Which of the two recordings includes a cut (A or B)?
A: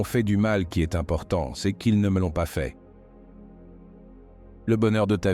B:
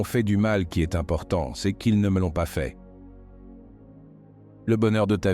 B